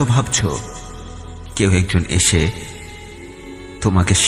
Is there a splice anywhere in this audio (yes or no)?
no